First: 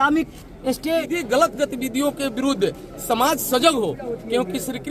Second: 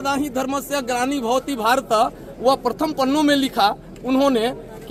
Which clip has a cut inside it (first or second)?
first